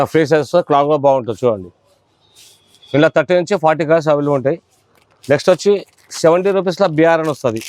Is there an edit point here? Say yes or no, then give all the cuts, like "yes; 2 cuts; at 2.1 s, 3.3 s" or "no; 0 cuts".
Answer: no; 0 cuts